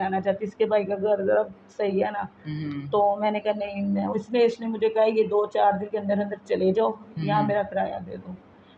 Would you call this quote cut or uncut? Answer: uncut